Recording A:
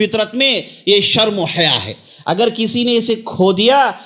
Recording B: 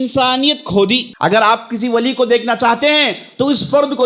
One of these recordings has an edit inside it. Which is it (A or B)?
B